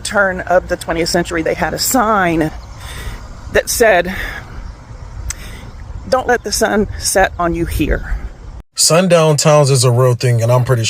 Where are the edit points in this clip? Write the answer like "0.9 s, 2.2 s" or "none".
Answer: 8.7 s